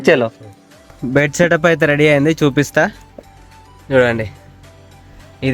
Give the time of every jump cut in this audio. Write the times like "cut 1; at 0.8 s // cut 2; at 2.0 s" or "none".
cut 1; at 0.9 s